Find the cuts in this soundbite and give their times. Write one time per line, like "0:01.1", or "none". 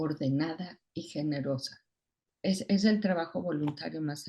0:02.3

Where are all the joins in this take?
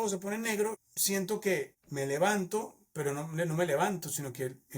0:01.8

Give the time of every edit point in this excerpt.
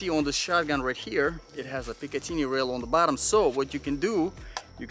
none

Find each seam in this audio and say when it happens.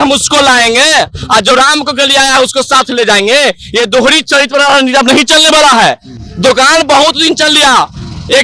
none

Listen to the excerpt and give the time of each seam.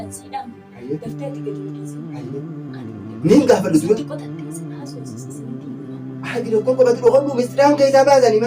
0:04.3
0:06.3

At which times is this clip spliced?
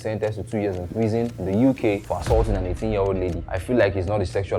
0:01.4
0:02.0
0:03.5

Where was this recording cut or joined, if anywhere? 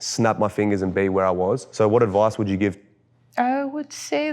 0:01.7
0:02.8

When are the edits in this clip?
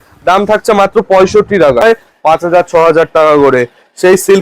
0:01.8

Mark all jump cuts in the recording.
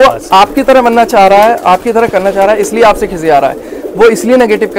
none

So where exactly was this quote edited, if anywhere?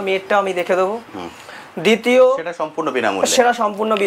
none

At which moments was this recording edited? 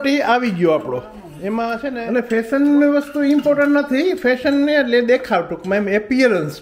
0:02.0

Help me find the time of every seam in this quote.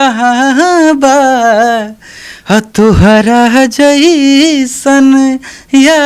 none

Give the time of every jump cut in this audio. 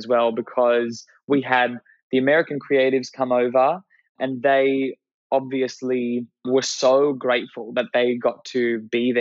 0:04.1
0:06.4

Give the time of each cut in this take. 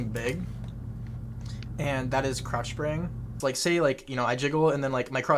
0:03.3

